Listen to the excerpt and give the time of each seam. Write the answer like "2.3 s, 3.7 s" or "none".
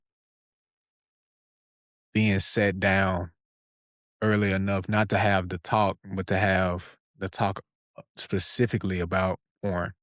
none